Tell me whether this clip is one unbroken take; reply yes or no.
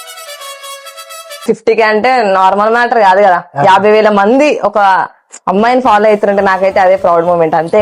no